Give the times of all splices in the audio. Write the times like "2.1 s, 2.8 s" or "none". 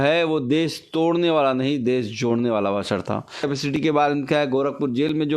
3.5 s